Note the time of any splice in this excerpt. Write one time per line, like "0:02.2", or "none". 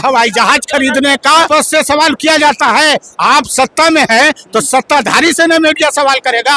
0:01.5